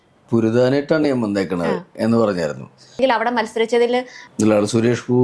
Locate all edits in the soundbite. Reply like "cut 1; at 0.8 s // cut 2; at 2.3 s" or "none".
cut 1; at 3.0 s // cut 2; at 4.2 s